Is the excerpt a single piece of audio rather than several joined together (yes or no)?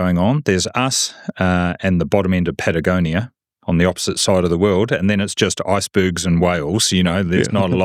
yes